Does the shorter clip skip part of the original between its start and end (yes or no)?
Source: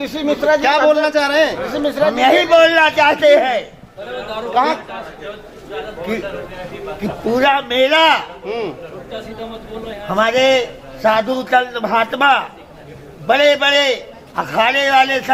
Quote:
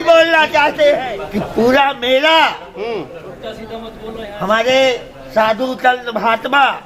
yes